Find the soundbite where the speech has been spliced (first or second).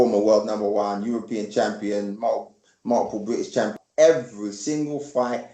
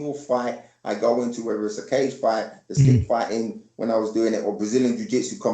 first